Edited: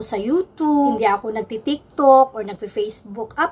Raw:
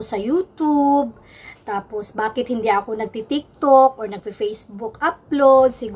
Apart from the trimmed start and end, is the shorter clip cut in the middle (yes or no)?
yes